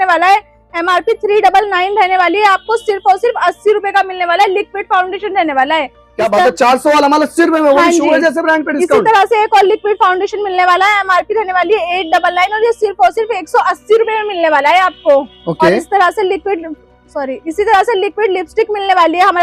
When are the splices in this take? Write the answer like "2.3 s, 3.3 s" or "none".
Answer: none